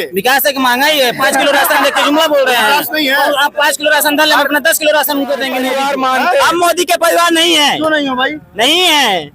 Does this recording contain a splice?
yes; 1 cut; at 5.6 s

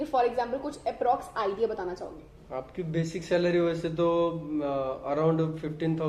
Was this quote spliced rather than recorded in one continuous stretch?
no; 0 cuts

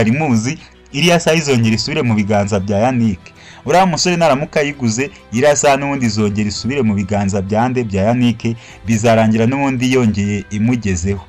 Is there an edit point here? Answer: no; 0 cuts

